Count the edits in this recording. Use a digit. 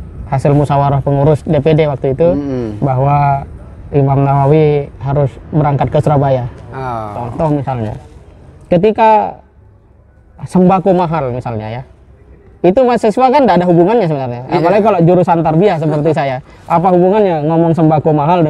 1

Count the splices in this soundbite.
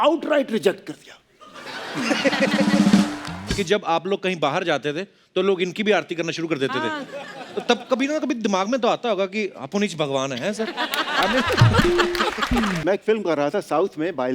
2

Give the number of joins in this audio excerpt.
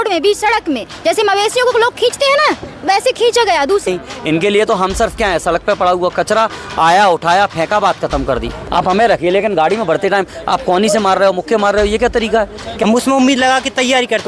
3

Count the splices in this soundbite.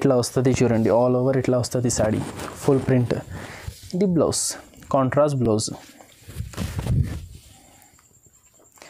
0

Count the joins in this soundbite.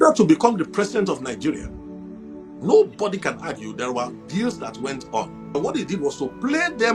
1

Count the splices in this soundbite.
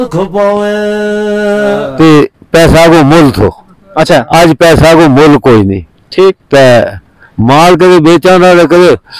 1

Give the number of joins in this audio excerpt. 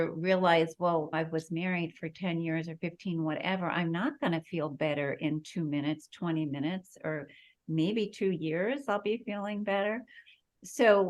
1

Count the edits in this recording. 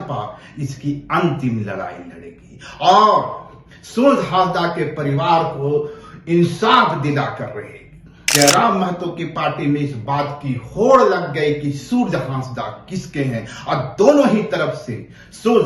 1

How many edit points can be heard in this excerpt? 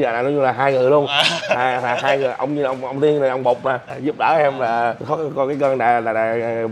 0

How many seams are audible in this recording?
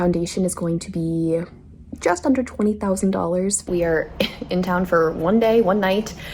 1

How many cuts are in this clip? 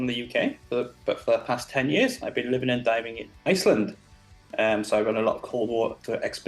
0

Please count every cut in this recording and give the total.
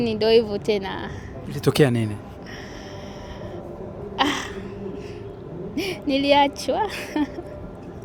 0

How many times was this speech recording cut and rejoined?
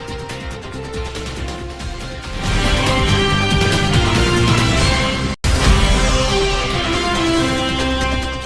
1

